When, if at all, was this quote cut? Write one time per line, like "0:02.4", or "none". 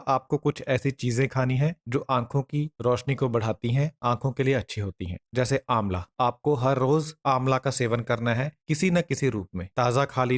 none